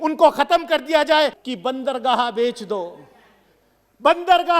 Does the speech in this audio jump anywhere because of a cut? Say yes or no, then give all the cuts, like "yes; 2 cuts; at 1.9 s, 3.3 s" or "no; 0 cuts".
yes; 1 cut; at 1.4 s